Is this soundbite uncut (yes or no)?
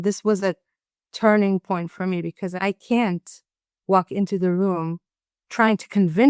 no